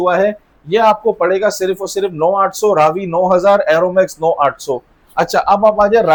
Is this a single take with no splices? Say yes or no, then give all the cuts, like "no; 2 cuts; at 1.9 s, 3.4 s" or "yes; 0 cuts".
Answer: yes; 0 cuts